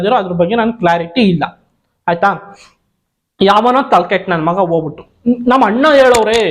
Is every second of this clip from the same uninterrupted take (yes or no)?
yes